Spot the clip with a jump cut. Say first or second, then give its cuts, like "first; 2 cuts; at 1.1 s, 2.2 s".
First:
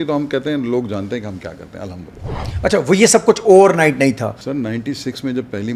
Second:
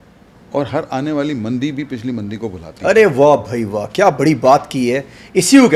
first; 1 cut; at 4.3 s